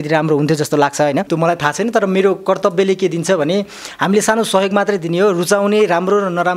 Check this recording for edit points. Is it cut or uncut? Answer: cut